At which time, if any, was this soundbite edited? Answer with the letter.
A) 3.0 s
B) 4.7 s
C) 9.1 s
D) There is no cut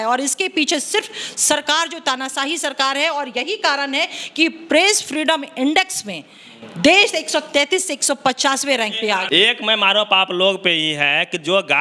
D